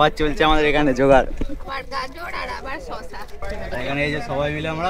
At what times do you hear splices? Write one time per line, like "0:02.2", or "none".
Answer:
none